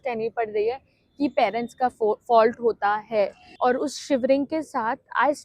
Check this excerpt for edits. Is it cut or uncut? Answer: cut